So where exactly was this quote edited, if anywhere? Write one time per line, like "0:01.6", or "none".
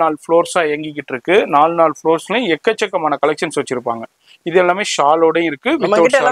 none